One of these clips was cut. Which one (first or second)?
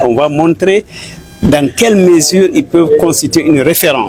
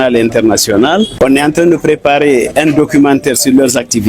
second